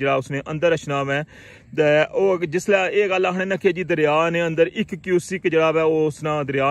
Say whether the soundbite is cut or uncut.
uncut